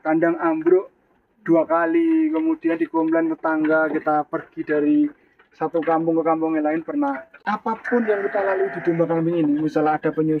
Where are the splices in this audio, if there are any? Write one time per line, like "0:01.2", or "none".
0:07.3